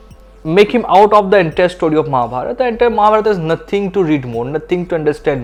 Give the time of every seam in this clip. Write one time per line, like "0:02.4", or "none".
none